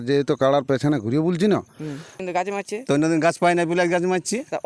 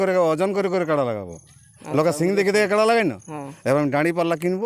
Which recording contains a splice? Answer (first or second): first